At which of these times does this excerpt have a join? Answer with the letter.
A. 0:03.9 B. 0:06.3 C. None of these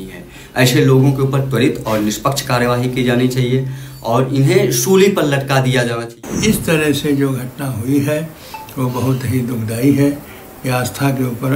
B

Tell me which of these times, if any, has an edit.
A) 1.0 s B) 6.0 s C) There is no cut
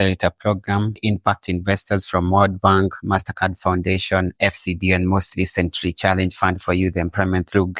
A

